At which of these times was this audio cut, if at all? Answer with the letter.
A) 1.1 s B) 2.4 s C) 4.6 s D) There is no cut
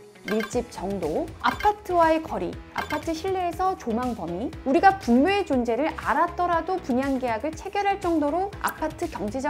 C